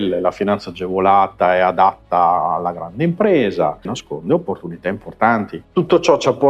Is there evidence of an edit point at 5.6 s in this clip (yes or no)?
yes